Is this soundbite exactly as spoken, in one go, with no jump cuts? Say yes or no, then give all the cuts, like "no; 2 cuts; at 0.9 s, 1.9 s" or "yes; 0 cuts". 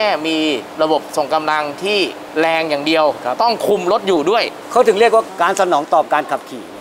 no; 1 cut; at 4.6 s